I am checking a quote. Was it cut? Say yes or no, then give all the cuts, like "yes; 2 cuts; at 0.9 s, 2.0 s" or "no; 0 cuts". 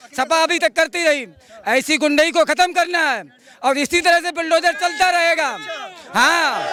no; 0 cuts